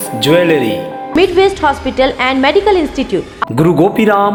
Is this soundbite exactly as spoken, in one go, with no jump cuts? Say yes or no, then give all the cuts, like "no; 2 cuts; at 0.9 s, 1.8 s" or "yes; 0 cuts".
yes; 0 cuts